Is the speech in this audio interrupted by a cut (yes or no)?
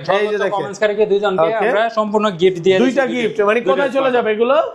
no